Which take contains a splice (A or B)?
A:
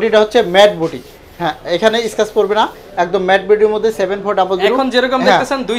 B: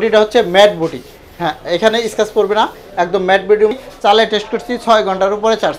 B